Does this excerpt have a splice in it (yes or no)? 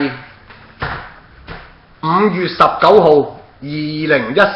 yes